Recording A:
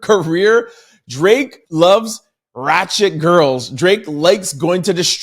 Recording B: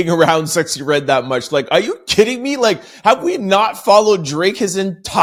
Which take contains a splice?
A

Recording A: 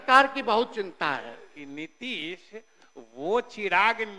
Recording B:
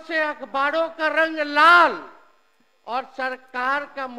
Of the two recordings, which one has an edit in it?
A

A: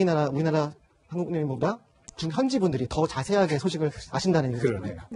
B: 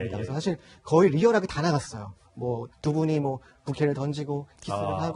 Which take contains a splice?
B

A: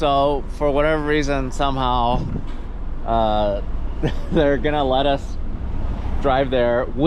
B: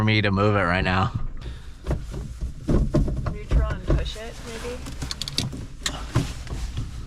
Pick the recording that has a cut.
B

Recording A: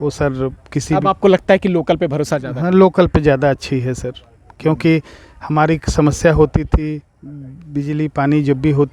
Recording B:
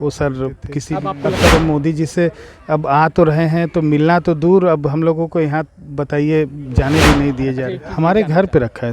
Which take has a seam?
B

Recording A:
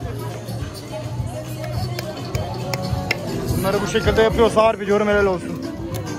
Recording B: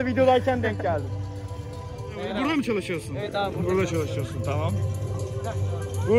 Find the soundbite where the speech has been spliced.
B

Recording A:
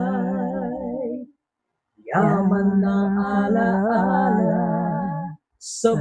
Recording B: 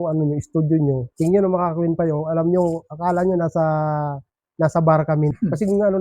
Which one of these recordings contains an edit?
B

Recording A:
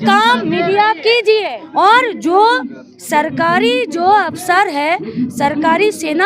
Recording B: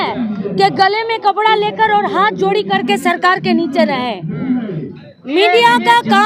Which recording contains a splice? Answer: A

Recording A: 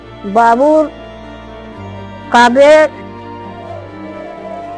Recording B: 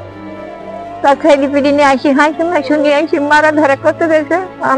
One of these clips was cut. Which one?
A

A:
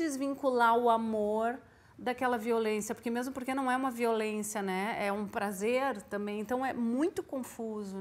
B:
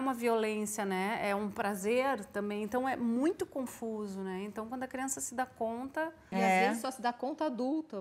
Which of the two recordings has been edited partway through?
B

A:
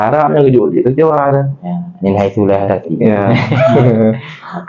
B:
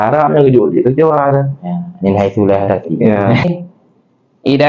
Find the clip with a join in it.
B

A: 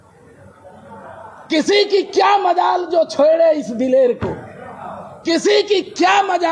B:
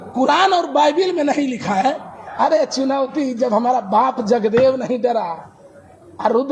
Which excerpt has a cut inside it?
B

